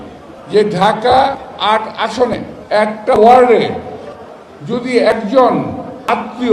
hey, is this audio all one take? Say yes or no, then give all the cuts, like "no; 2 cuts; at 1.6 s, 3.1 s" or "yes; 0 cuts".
no; 1 cut; at 2.3 s